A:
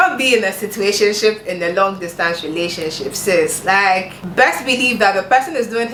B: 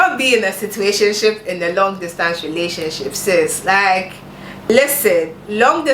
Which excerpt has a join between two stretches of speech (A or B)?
B